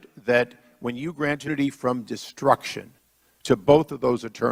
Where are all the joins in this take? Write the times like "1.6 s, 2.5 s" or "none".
none